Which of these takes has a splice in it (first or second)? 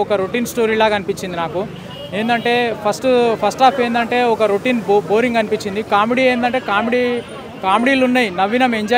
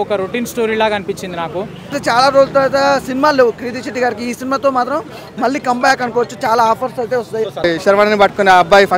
second